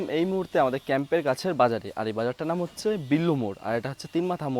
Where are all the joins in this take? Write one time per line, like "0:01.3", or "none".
none